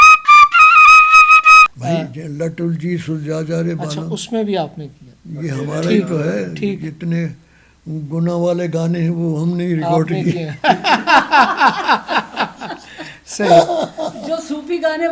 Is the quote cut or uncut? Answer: cut